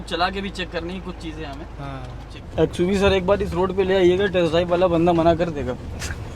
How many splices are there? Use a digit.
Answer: 1